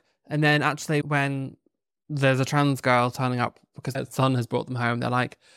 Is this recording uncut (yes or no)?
no